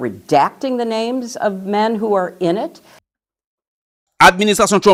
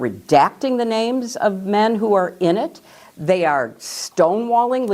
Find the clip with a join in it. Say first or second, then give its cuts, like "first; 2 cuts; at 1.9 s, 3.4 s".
second; 1 cut; at 3.1 s